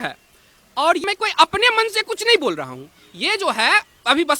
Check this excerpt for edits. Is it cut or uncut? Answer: cut